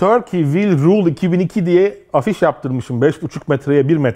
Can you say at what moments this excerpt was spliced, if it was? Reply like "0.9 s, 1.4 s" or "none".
none